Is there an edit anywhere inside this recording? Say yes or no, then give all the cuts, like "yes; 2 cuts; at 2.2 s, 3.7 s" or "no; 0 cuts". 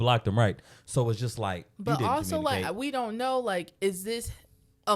yes; 1 cut; at 1.7 s